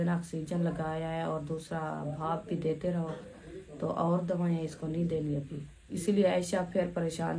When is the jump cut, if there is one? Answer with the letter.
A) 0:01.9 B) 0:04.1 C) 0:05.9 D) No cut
C